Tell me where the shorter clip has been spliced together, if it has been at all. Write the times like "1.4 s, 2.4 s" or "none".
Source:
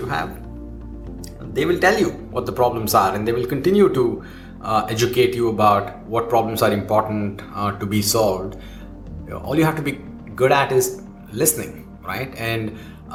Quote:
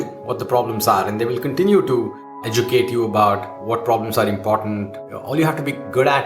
2.5 s, 5.4 s